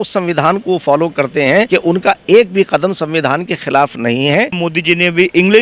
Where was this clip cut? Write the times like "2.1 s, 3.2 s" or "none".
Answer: 1.7 s, 4.6 s